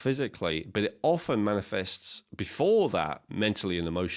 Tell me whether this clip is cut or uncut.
uncut